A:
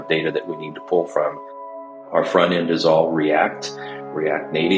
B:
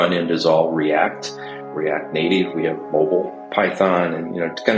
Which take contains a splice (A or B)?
B